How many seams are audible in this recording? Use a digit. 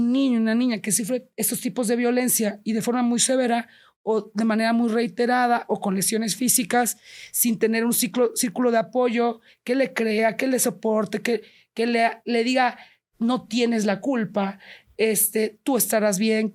0